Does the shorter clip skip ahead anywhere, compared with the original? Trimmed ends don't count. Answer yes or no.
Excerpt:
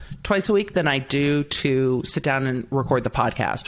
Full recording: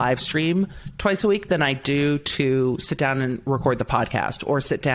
no